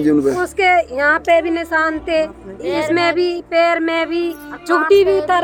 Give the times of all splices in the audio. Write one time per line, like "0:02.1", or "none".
none